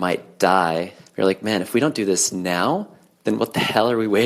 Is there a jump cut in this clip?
yes; 1 cut; at 1.0 s

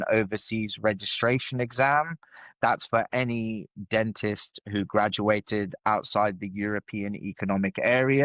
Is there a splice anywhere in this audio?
no; 0 cuts

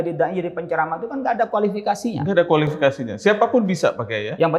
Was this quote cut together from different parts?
no; 0 cuts

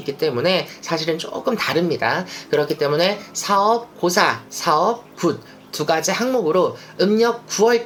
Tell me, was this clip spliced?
no; 0 cuts

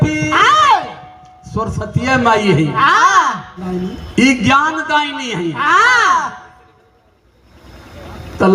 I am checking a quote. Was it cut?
yes; 1 cut; at 3.6 s

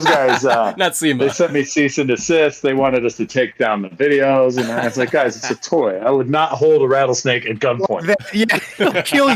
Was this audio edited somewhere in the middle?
no; 0 cuts

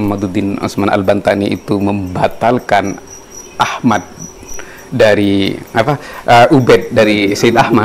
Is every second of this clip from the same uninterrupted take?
yes; 0 cuts

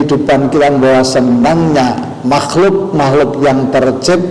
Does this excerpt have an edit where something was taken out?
no; 0 cuts

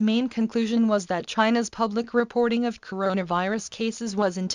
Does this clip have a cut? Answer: no; 0 cuts

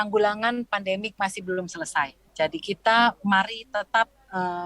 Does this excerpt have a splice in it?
yes; 1 cut; at 2.2 s

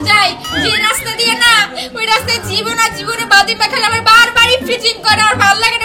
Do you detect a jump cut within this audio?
no; 0 cuts

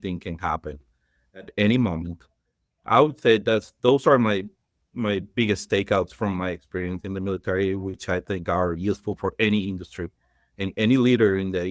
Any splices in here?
no; 0 cuts

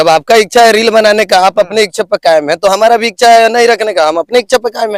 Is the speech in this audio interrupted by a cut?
no; 0 cuts

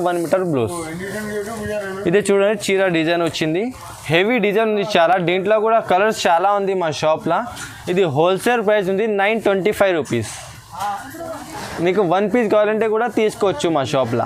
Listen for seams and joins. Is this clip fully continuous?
yes; 0 cuts

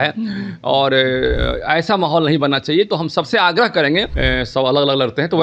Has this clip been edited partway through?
yes; 1 cut; at 4.1 s

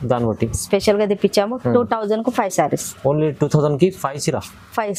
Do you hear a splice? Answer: no; 0 cuts

